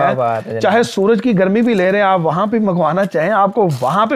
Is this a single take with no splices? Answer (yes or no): yes